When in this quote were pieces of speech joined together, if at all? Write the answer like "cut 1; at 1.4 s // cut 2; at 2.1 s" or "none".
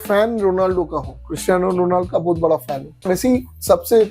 cut 1; at 3.0 s